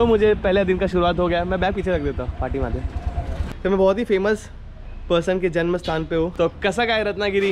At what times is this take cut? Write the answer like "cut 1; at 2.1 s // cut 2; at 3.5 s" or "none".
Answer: cut 1; at 3.5 s // cut 2; at 6.3 s